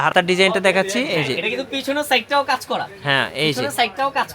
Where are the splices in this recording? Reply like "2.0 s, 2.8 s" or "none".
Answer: none